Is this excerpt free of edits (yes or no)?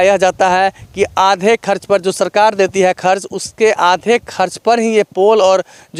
yes